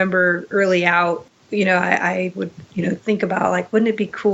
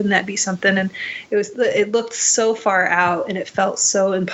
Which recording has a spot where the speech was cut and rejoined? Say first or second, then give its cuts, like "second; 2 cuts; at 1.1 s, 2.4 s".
first; 1 cut; at 1.3 s